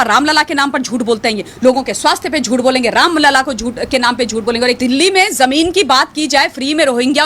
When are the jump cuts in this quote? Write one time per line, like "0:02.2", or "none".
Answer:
0:04.8